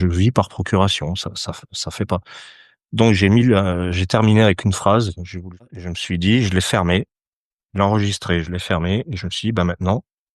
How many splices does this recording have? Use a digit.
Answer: 1